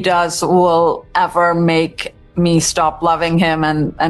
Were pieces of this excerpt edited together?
no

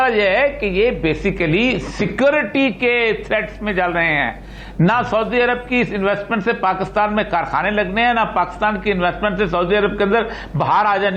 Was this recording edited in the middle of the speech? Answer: no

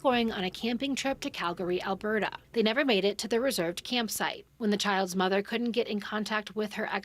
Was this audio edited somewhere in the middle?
yes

